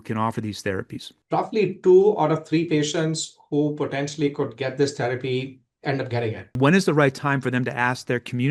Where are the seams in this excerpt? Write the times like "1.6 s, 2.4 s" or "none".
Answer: 1.1 s, 6.6 s